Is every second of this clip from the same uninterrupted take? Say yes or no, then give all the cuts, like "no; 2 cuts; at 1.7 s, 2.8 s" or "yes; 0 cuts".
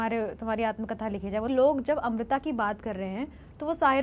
no; 1 cut; at 1.5 s